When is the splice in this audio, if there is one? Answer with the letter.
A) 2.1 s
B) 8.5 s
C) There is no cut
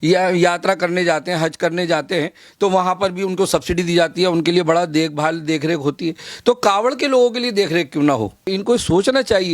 B